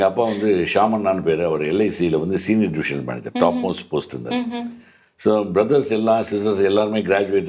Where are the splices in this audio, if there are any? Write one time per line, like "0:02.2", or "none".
none

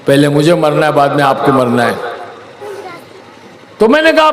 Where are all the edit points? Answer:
0:02.6

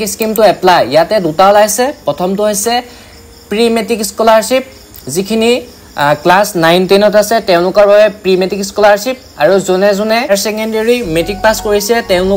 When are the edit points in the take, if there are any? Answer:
0:10.3

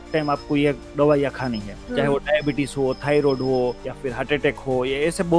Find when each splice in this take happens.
0:01.7
0:03.9

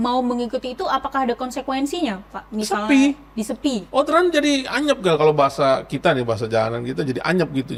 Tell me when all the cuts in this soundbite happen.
none

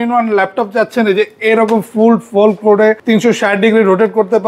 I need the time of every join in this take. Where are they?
0:03.0

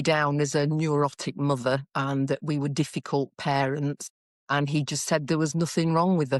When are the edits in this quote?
none

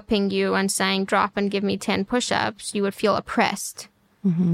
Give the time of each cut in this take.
0:01.1

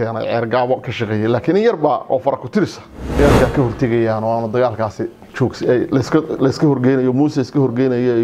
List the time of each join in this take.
0:03.2

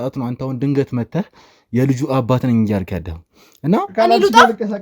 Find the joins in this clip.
0:03.9

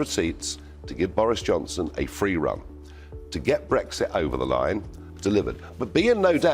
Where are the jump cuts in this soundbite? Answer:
0:05.0

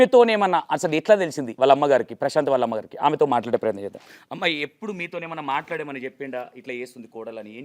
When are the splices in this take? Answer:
0:01.1

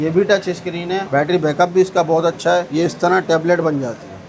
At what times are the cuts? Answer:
0:02.7

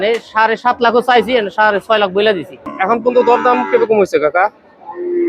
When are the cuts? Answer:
0:02.6

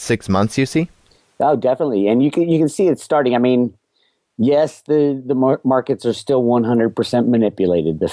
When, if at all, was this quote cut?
none

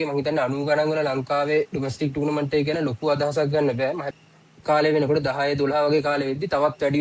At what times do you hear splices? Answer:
0:04.1

